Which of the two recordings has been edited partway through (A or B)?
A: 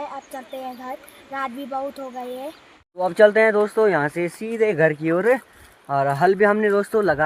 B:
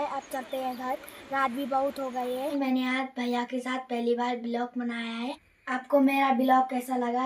B